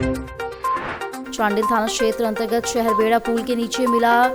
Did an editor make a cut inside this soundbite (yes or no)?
no